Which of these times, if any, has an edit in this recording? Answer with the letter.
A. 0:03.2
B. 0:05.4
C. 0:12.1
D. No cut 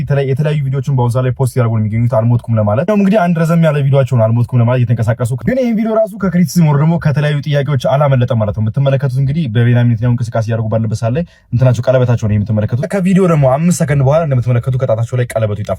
B